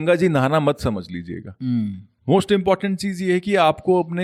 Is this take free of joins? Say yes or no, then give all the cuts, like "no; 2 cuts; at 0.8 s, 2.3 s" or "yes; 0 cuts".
yes; 0 cuts